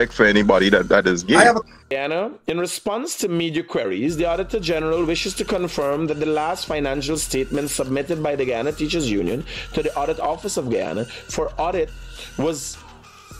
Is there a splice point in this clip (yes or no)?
yes